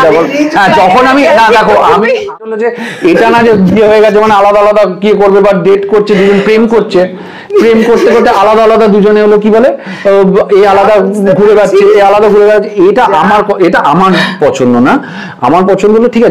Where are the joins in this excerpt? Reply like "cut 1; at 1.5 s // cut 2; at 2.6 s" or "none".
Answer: cut 1; at 2.5 s